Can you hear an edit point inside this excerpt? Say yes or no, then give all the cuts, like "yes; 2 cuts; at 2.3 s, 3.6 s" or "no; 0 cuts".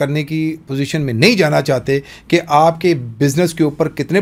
no; 0 cuts